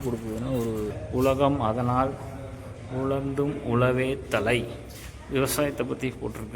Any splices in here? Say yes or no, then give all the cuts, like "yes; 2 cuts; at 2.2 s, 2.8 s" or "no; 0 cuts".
yes; 1 cut; at 0.9 s